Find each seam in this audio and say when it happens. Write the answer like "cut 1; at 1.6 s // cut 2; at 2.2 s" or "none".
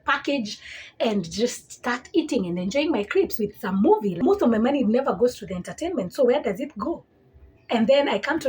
cut 1; at 4.2 s